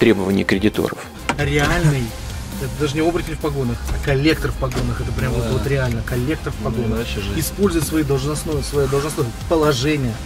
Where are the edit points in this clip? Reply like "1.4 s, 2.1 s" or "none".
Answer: 1.1 s